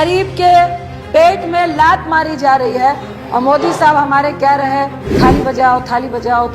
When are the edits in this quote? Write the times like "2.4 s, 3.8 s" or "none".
3.1 s, 5.0 s